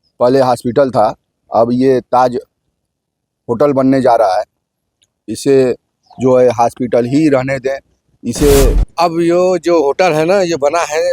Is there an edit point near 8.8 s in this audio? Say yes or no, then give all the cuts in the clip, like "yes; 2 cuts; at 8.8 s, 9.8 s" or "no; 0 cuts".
yes; 1 cut; at 8.8 s